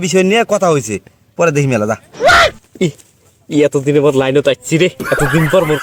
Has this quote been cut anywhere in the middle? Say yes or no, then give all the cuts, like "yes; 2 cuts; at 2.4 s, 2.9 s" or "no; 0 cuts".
no; 0 cuts